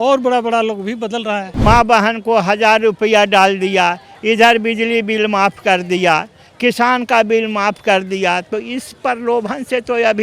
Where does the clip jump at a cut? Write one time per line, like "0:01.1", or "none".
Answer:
0:01.5